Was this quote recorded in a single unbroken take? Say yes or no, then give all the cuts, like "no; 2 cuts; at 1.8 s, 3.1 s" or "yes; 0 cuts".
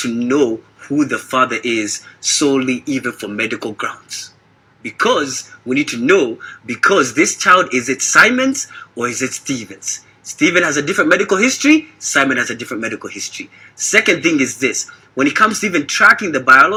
yes; 0 cuts